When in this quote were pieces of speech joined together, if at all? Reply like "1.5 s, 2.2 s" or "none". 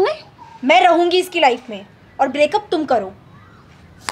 none